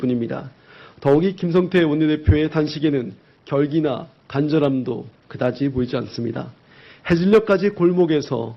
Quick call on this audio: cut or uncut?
uncut